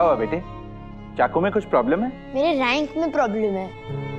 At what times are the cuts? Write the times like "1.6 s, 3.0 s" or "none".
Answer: 2.2 s

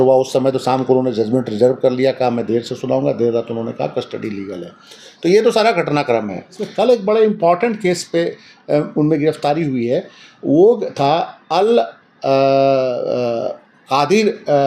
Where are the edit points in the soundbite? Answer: 6.6 s

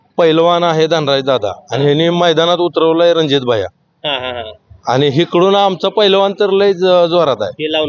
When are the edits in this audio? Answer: none

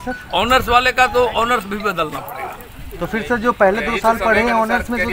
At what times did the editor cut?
none

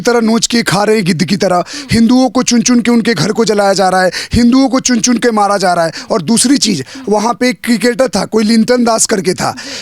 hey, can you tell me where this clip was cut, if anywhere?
none

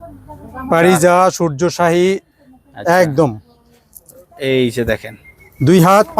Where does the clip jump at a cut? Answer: none

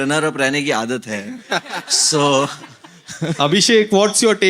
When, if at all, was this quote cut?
none

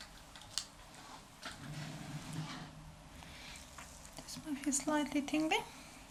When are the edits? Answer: none

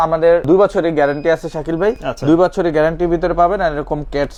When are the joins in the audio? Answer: none

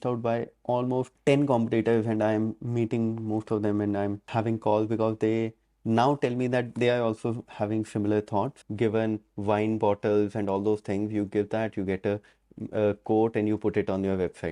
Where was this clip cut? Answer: 8.6 s

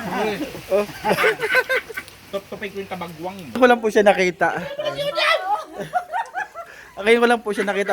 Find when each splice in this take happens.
3.6 s

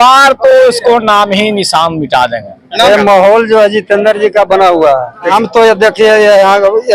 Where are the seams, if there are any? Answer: 2.9 s, 5.3 s

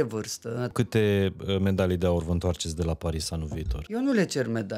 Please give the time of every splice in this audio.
0.7 s, 3.8 s

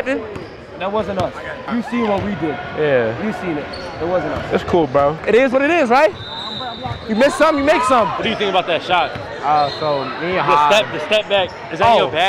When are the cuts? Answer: 1.7 s, 5.2 s, 8.2 s

